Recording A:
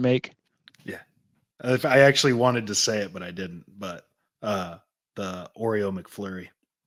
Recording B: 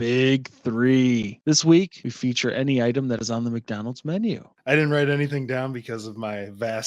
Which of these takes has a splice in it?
B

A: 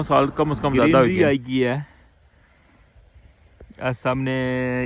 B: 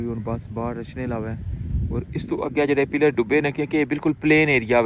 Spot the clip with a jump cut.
A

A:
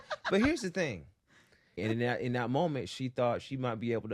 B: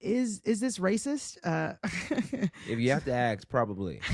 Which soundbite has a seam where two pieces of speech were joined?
A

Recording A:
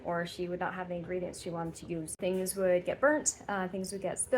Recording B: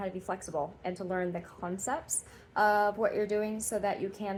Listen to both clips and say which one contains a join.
A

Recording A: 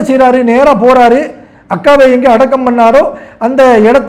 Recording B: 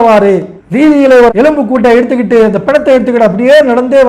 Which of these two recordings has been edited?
B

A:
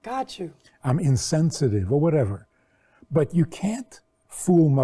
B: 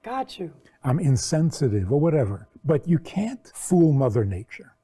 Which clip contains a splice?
B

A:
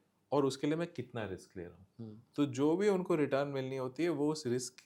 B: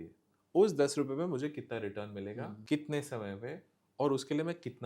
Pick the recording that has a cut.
B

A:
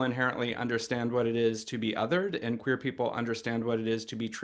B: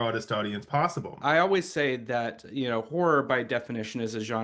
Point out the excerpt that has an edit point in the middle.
B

